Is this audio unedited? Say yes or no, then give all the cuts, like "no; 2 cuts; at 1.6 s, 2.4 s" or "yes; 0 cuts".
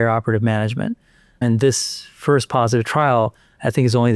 yes; 0 cuts